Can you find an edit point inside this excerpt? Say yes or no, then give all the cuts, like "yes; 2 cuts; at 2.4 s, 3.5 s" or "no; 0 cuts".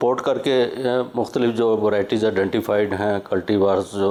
no; 0 cuts